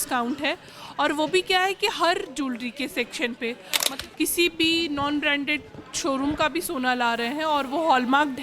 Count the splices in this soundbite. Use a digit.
1